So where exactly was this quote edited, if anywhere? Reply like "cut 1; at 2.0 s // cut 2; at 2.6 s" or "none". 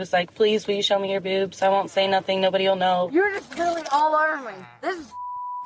cut 1; at 3.1 s